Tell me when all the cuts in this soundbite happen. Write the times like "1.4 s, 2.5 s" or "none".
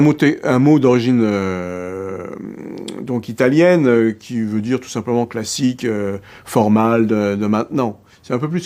none